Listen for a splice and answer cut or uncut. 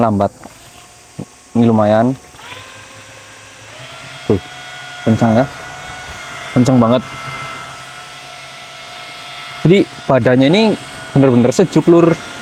uncut